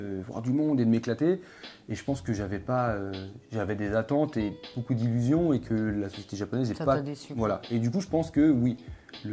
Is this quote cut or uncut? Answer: uncut